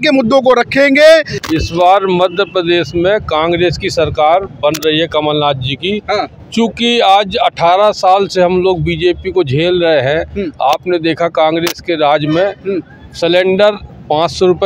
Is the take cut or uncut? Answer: cut